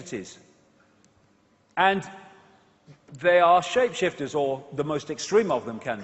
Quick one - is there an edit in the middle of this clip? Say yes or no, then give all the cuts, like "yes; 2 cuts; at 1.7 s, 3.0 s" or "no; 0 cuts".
yes; 1 cut; at 5.2 s